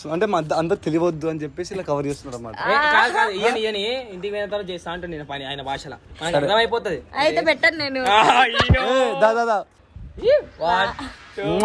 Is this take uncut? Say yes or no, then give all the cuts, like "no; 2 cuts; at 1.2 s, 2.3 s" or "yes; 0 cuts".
no; 1 cut; at 9.8 s